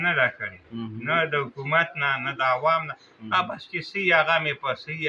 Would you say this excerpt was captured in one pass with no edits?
yes; 0 cuts

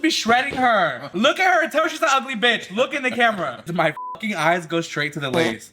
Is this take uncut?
no; 2 cuts; at 1.0 s, 3.6 s

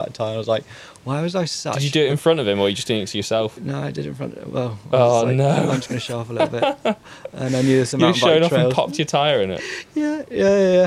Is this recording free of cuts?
yes; 0 cuts

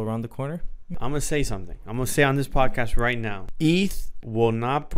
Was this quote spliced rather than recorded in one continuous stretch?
yes; 2 cuts; at 0.9 s, 3.4 s

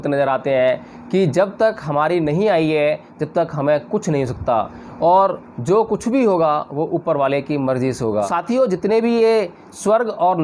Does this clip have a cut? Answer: yes; 1 cut; at 8.3 s

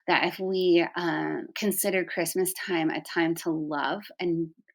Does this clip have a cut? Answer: no; 0 cuts

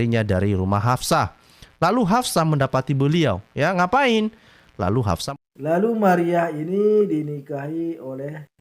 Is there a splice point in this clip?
yes; 1 cut; at 5.2 s

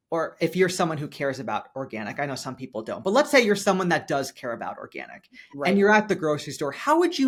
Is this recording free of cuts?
yes; 0 cuts

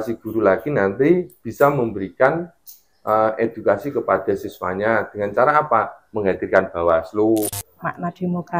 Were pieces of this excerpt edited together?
yes; 1 cut; at 7.6 s

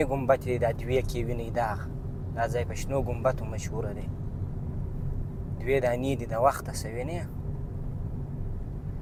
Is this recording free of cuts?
yes; 0 cuts

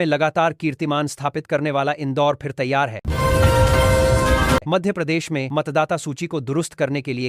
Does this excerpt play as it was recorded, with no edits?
no; 2 cuts; at 3.0 s, 4.6 s

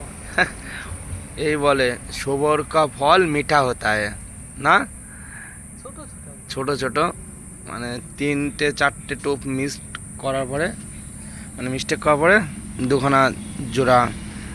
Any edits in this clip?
no; 0 cuts

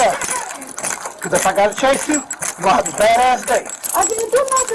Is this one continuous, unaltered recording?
no; 1 cut; at 3.8 s

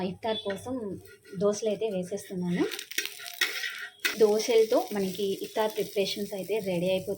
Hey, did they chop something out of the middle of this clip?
yes; 1 cut; at 4.0 s

